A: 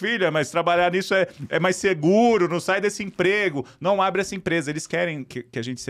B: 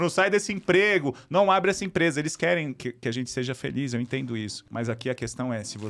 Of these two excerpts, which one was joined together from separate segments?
B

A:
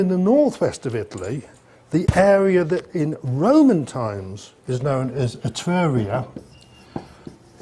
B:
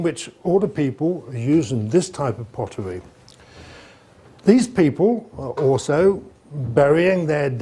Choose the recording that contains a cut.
A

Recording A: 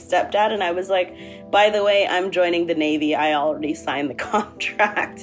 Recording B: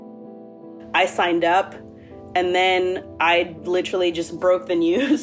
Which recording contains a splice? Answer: B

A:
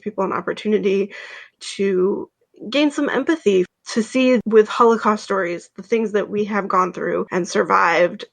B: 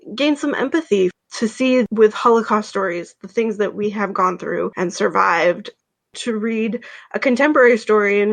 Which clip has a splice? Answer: A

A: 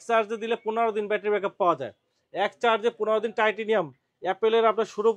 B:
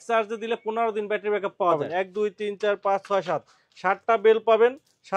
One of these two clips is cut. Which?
B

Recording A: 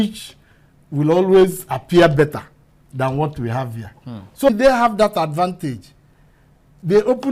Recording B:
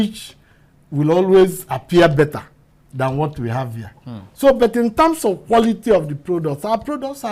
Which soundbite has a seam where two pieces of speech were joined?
A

